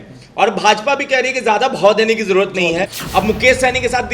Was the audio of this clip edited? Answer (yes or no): yes